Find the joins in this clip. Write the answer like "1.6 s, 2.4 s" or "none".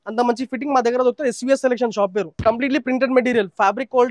2.4 s